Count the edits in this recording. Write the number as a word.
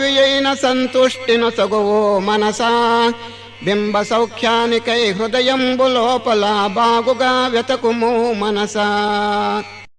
zero